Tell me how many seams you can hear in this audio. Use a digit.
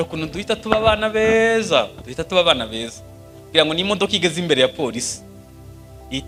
0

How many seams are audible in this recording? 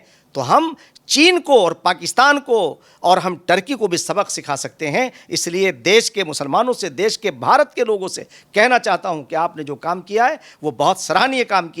0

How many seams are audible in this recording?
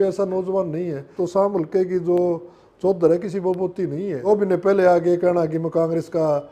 2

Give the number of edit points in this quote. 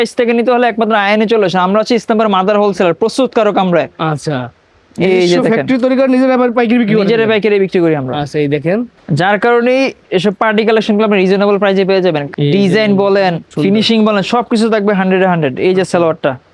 0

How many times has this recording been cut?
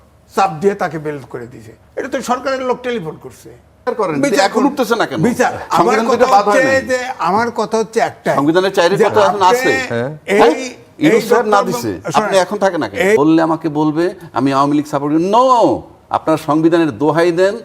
2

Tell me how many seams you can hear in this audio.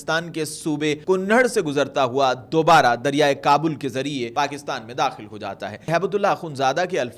3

